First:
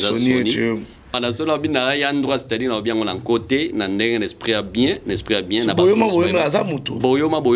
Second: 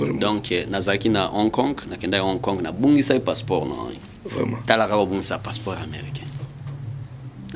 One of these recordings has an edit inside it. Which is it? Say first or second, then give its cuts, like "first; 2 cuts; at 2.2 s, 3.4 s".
first; 1 cut; at 1.2 s